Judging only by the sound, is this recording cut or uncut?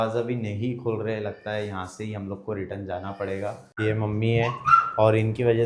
cut